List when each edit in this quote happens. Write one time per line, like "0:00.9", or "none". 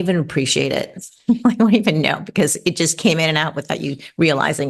none